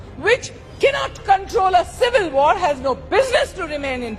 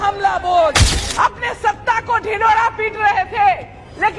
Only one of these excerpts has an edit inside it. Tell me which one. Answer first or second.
second